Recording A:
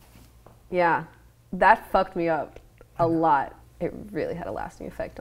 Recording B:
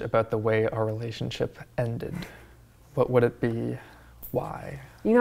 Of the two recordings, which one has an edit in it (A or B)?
A